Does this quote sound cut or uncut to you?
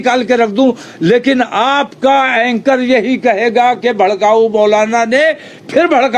uncut